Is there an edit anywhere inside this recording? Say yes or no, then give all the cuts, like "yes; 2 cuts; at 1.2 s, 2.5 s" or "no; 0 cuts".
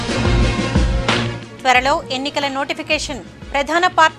no; 0 cuts